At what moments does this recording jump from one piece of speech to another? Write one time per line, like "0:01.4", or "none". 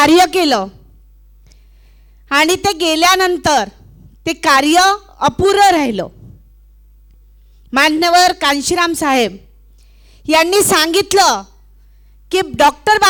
none